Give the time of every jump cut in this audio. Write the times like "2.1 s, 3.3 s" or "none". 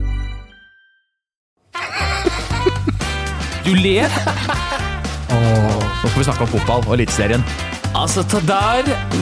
1.5 s